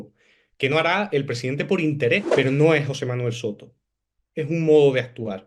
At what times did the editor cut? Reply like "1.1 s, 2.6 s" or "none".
2.3 s